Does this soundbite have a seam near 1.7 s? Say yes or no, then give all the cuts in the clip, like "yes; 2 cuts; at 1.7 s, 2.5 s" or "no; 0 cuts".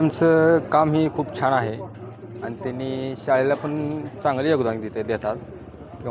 no; 0 cuts